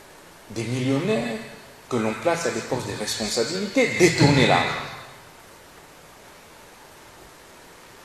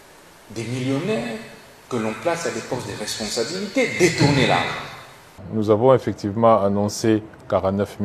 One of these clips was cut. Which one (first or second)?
second